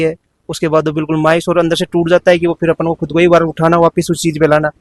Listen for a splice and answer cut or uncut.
uncut